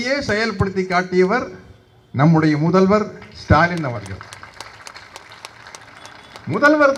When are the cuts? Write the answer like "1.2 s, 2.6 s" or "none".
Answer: none